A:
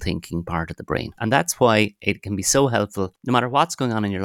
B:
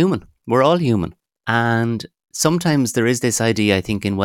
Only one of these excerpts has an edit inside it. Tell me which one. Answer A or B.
A